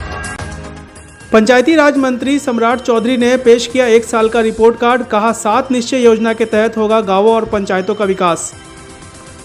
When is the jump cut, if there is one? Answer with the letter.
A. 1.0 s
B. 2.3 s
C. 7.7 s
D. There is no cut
A